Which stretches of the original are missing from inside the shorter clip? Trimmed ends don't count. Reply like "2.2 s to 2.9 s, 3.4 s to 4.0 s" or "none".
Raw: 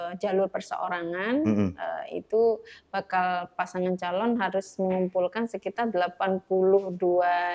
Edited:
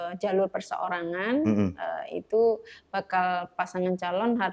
none